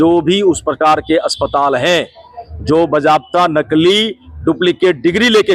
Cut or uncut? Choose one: uncut